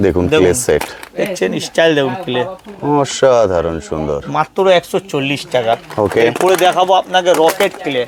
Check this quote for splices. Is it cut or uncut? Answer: uncut